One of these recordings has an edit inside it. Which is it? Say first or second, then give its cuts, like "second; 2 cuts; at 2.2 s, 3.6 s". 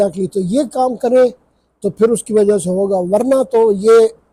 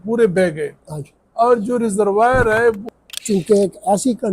second; 1 cut; at 2.8 s